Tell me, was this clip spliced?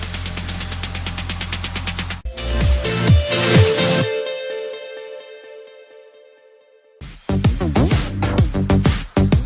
yes; 1 cut; at 2.2 s

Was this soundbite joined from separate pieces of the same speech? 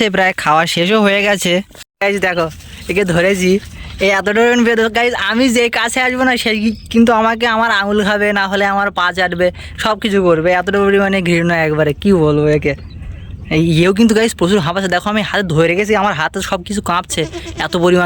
yes; 1 cut; at 1.7 s

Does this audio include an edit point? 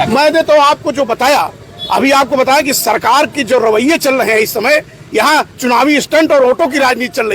no; 0 cuts

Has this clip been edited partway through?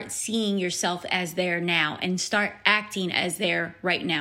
no; 0 cuts

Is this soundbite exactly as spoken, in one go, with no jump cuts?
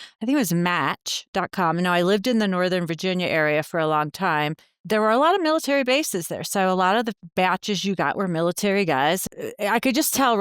no; 2 cuts; at 4.7 s, 9.2 s

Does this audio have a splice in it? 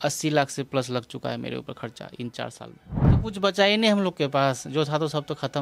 yes; 1 cut; at 3.2 s

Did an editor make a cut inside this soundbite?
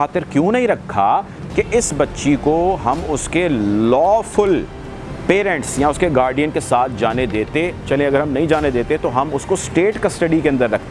no; 0 cuts

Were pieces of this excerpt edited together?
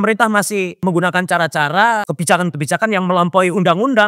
yes; 2 cuts; at 0.8 s, 2.0 s

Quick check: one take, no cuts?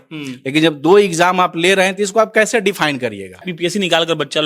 no; 1 cut; at 3.5 s

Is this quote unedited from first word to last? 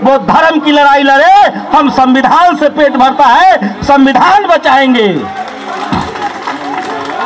yes; 0 cuts

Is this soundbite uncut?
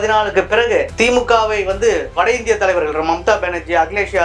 no; 2 cuts; at 0.9 s, 2.1 s

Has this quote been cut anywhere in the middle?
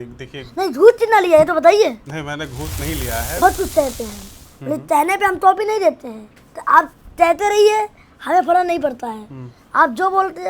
yes; 1 cut; at 3.4 s

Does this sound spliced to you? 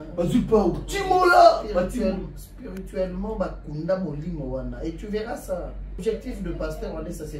yes; 1 cut; at 6.0 s

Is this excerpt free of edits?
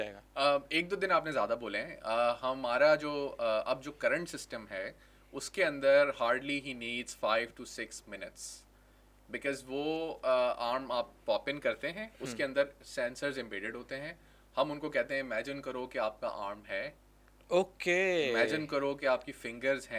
yes; 0 cuts

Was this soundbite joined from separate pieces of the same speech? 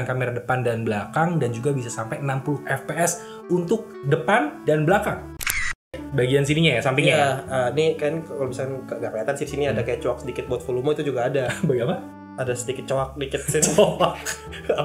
yes; 1 cut; at 5.4 s

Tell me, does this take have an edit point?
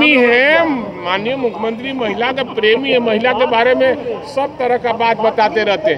no; 0 cuts

